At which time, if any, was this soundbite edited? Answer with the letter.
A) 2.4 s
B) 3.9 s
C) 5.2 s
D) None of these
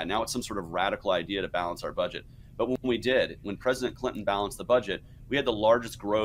A